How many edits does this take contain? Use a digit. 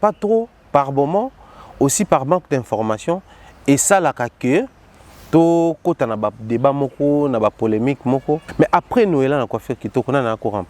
1